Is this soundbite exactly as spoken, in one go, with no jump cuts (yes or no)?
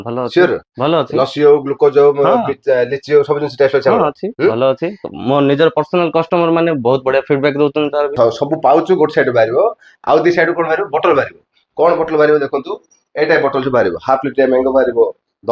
no